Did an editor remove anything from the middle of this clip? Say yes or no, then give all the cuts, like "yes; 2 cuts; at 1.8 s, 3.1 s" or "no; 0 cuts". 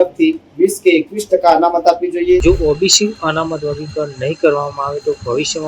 yes; 1 cut; at 2.4 s